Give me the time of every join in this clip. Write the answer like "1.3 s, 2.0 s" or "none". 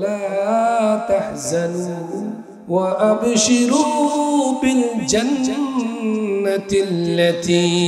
2.5 s